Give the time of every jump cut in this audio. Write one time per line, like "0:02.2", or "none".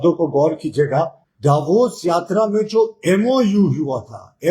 0:01.2